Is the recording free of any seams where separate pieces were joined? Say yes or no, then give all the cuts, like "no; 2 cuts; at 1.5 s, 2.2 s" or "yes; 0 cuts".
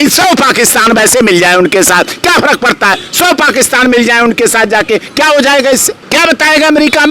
no; 1 cut; at 6.0 s